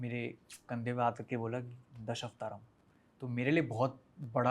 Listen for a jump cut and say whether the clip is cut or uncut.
uncut